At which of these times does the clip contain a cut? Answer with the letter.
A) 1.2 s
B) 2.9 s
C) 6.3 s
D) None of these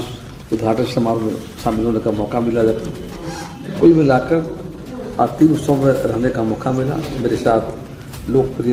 D